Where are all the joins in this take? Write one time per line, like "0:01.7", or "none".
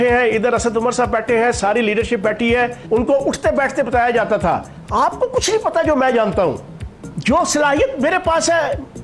0:02.8
0:07.1